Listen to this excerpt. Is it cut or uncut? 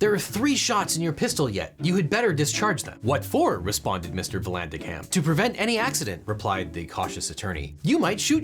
uncut